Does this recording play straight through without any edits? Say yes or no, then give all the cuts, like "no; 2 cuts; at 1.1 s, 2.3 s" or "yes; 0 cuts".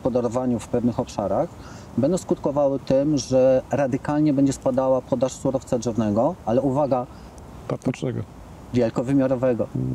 yes; 0 cuts